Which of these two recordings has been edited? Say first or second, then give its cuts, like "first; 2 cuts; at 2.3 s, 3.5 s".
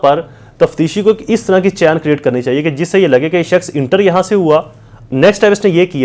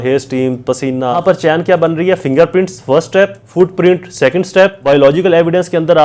second; 3 cuts; at 1.2 s, 3.4 s, 4.8 s